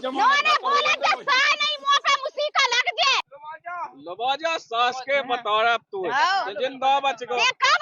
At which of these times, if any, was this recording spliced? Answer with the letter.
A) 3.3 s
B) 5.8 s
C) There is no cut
A